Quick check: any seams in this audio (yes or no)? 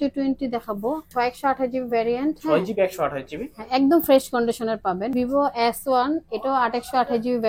yes